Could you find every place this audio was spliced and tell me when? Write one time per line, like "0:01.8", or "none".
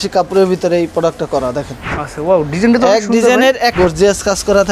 0:03.7